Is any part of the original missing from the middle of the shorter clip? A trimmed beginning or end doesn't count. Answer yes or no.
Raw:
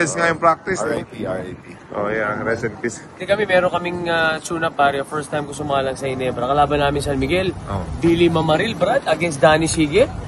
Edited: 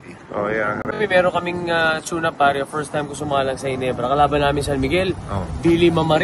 yes